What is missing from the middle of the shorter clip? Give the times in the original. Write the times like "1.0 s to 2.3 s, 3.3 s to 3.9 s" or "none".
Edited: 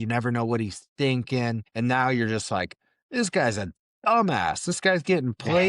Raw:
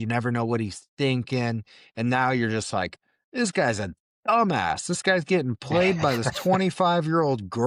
1.7 s to 1.9 s